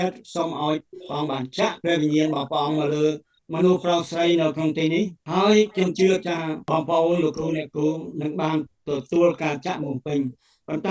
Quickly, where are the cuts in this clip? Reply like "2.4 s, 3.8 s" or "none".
5.2 s, 6.6 s